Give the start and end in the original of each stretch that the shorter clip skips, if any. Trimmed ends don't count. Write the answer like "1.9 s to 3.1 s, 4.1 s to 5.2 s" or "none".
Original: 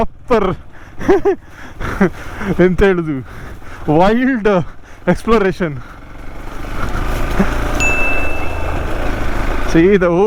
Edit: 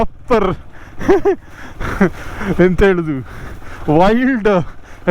none

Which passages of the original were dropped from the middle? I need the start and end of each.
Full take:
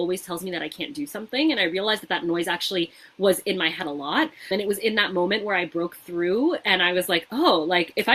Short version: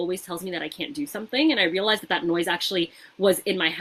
none

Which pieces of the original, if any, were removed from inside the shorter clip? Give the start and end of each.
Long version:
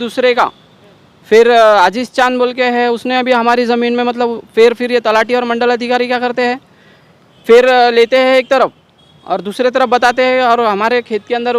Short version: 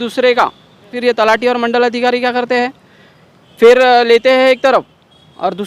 0.9 s to 4.8 s

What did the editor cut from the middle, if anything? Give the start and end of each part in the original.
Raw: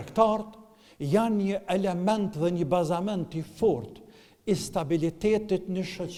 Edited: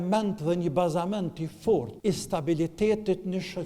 3.9 s to 4.4 s

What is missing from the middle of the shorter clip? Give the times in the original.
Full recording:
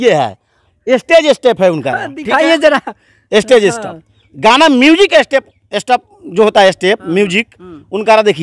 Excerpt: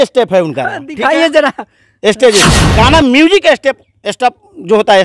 3.9 s to 4.3 s

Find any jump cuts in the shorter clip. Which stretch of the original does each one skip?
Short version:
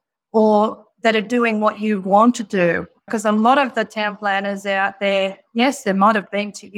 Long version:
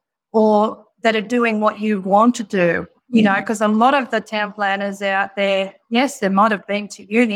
3.0 s to 3.4 s

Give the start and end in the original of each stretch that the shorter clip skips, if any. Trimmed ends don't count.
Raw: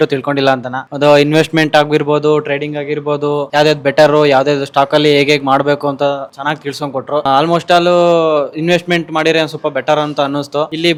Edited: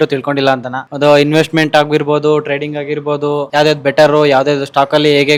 none

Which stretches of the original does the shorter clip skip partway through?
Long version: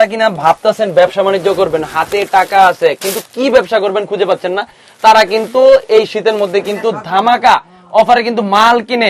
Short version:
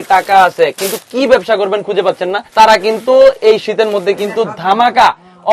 4.6 s to 4.9 s

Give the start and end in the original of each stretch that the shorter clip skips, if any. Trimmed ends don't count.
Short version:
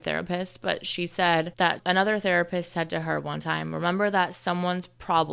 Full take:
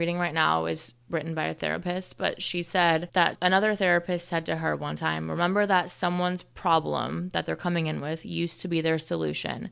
none

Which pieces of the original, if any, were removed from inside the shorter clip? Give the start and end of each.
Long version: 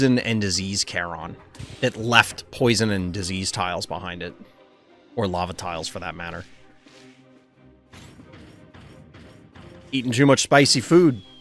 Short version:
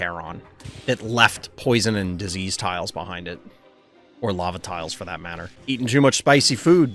6.4 s to 9.7 s

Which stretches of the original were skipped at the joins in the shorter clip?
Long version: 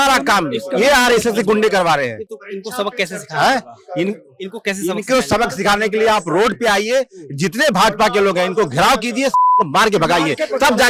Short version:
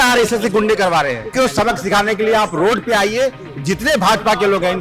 2.2 s to 5.0 s

